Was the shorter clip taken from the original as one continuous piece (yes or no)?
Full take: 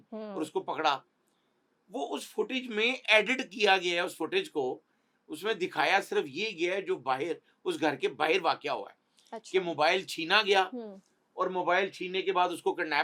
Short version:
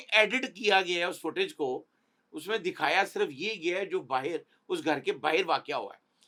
yes